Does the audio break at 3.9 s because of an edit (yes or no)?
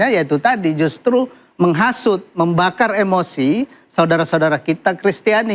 no